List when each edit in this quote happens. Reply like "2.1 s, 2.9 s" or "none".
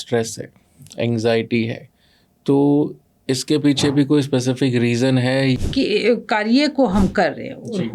5.6 s